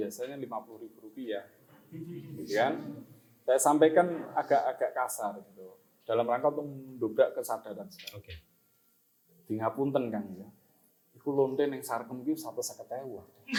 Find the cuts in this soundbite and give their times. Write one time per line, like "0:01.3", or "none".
none